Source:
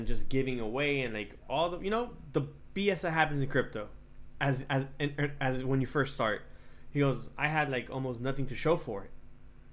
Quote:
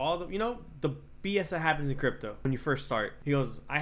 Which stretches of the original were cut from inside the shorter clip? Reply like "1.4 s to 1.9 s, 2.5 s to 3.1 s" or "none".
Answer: 4.3 s to 6.5 s

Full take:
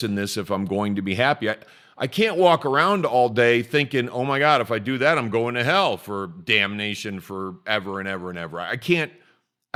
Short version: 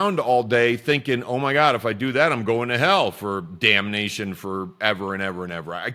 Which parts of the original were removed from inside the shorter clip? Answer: none

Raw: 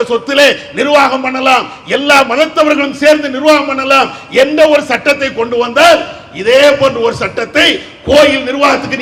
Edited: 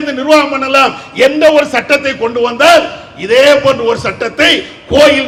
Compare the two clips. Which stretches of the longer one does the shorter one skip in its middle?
none

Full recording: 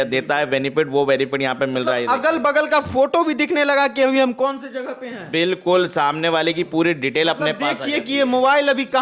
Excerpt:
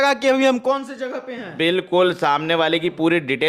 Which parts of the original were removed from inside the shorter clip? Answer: none

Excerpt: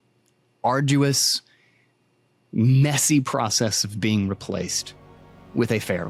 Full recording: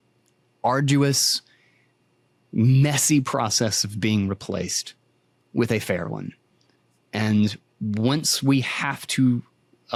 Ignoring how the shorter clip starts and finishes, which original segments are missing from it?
none

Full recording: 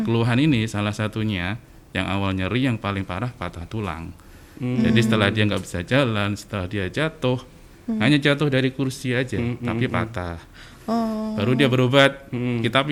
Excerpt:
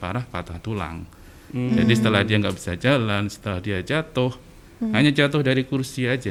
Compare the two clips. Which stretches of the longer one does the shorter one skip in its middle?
none

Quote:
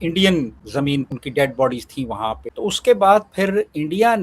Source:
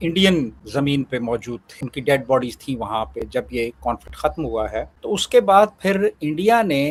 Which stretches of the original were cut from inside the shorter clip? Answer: 1.1 s to 1.8 s, 3.2 s to 4.9 s

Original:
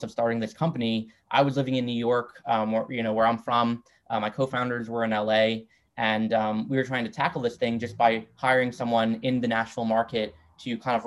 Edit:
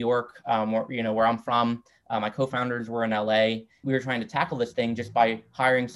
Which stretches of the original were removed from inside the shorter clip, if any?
5.8 s to 6.7 s

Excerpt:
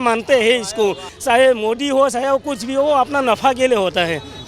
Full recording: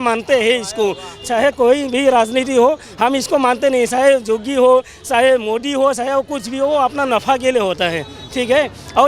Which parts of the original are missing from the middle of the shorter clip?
1.1 s to 5.0 s

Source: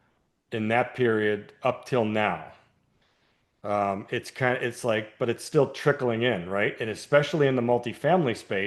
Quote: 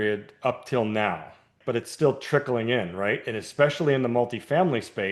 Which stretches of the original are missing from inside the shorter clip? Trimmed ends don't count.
2.8 s to 5.1 s

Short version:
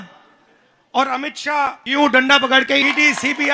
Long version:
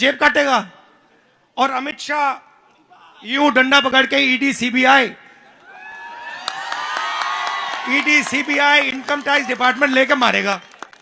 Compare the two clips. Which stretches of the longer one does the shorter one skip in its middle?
2.4 s to 3.2 s, 4.2 s to 7.9 s

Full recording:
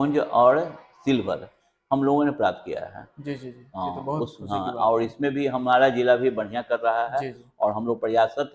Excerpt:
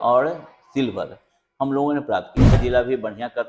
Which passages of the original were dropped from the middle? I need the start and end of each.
2.9 s to 5.9 s

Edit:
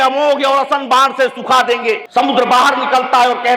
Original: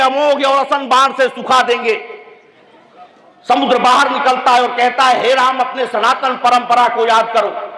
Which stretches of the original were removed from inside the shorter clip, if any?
2.0 s to 3.4 s

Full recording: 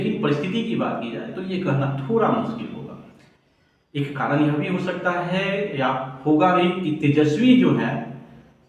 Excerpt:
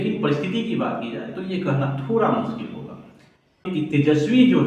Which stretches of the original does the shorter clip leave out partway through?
3.7 s to 6.8 s

